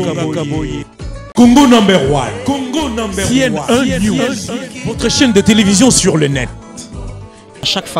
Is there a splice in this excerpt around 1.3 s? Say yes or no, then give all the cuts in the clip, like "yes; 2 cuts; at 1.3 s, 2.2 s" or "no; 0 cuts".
yes; 1 cut; at 1.3 s